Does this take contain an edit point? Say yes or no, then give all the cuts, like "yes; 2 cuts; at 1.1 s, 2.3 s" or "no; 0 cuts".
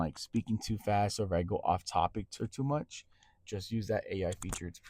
yes; 1 cut; at 2.3 s